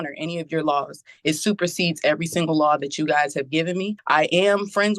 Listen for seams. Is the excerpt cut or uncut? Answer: cut